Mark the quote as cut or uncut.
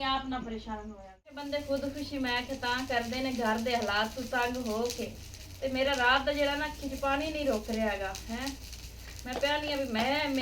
cut